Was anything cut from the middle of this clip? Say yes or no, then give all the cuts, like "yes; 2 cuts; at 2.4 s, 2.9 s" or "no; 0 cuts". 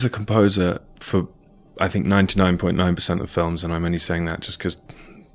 no; 0 cuts